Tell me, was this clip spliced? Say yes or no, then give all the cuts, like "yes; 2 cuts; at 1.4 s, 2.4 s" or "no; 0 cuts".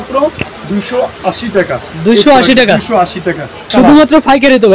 yes; 1 cut; at 3.6 s